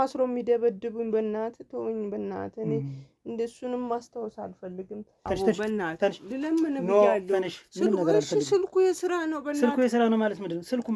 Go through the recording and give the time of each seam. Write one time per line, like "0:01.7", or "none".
0:05.2

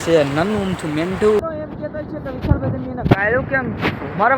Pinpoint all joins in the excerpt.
0:01.4

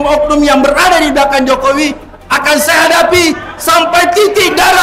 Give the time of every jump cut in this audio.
none

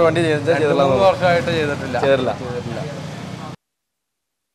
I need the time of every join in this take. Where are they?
none

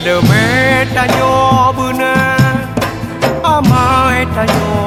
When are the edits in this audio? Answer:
none

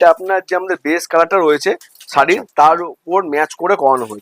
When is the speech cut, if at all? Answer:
none

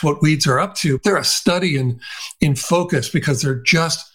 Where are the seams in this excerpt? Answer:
0:01.0

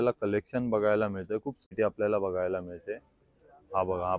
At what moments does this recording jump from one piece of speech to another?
0:01.7

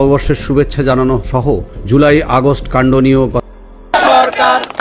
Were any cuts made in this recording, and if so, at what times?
0:03.5

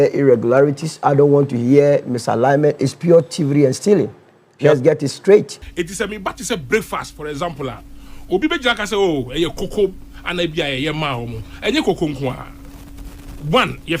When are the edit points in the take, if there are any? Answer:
0:05.5

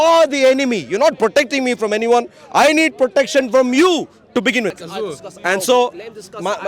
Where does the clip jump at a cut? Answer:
0:04.7

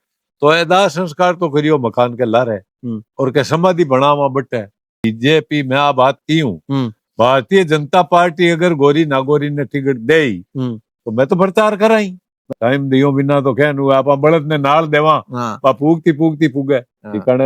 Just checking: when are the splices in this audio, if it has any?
0:05.0
0:12.5

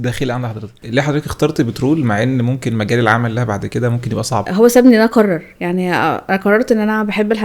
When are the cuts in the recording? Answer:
0:00.8
0:04.5

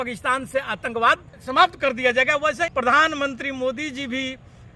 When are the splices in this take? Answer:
0:01.5
0:02.7

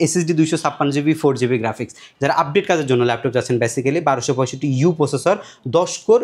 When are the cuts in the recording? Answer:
0:02.0

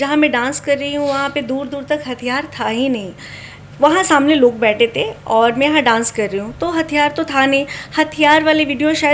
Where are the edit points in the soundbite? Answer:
none

